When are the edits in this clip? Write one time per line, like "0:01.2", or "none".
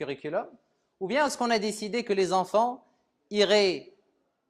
0:01.7